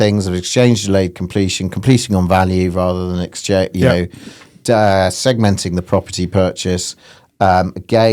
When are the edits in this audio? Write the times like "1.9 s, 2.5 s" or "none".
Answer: none